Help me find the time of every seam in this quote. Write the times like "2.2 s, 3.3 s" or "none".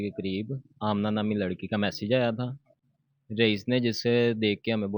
none